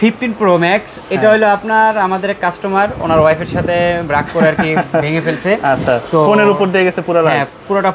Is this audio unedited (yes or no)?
yes